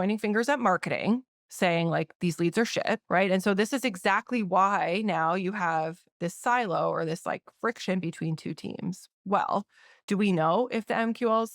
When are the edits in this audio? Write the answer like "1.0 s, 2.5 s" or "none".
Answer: 3.0 s